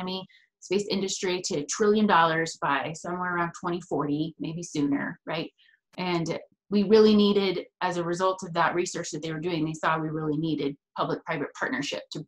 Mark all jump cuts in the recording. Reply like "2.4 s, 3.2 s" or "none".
6.6 s